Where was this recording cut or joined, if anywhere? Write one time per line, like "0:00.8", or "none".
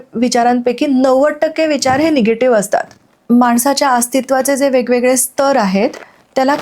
0:03.1